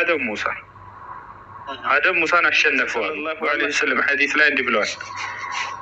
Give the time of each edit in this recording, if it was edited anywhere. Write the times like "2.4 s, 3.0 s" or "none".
3.2 s